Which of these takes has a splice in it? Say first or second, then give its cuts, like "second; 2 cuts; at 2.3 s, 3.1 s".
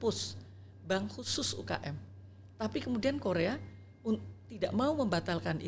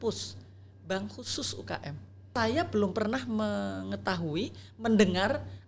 second; 1 cut; at 2.3 s